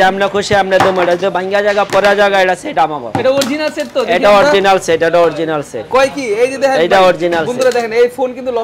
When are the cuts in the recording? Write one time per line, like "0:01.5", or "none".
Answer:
none